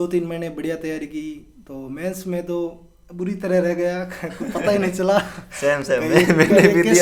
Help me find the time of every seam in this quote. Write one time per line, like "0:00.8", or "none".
none